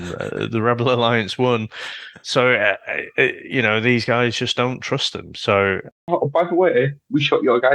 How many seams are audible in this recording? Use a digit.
1